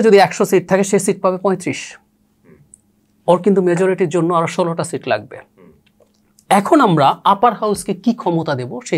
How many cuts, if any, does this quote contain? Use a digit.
0